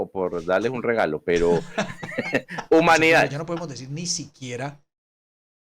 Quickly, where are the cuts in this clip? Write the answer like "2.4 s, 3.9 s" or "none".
3.4 s